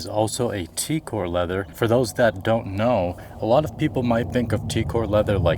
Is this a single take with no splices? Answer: yes; 0 cuts

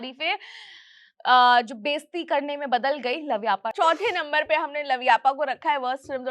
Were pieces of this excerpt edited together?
yes; 1 cut; at 3.7 s

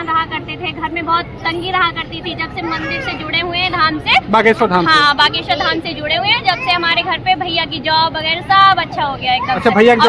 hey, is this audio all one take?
yes; 0 cuts

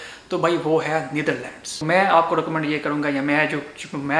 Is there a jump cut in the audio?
yes; 1 cut; at 1.7 s

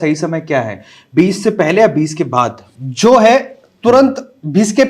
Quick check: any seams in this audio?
no; 0 cuts

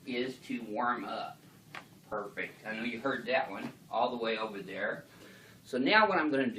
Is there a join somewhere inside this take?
yes; 1 cut; at 5.0 s

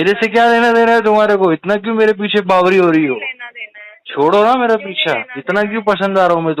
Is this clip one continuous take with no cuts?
yes; 0 cuts

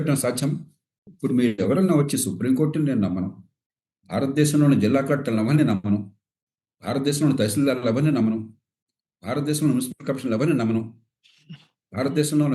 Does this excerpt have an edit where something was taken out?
yes; 1 cut; at 1.1 s

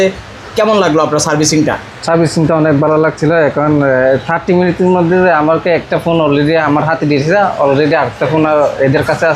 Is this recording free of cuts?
yes; 0 cuts

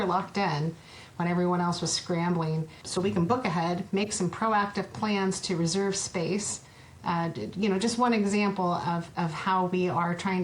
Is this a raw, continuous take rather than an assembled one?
no; 1 cut; at 2.8 s

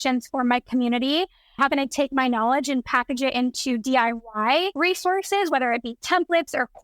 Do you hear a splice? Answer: yes; 2 cuts; at 1.6 s, 4.7 s

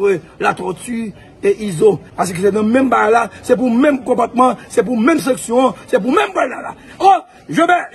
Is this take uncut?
yes; 0 cuts

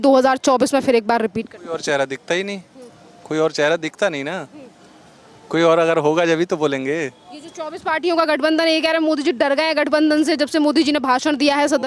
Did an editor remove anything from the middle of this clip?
no; 0 cuts

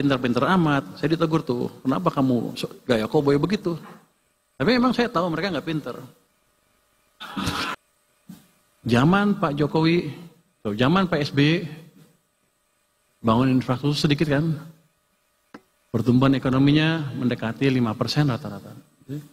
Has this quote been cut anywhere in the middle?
yes; 1 cut; at 7.8 s

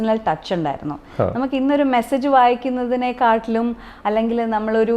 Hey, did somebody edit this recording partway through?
no; 0 cuts

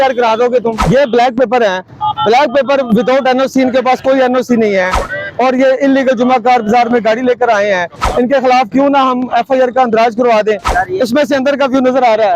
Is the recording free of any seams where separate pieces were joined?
no; 2 cuts; at 0.8 s, 10.7 s

